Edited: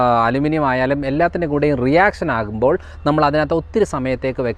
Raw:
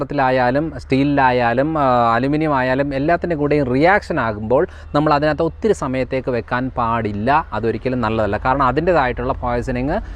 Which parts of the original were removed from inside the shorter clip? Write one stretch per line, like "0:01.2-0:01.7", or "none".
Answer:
none